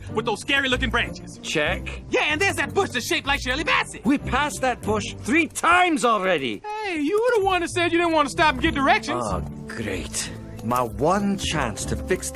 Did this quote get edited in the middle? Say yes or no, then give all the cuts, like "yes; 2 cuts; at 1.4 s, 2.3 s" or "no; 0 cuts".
yes; 2 cuts; at 1.7 s, 9.6 s